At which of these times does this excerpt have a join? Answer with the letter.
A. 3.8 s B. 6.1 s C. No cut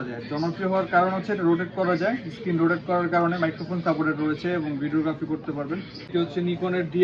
B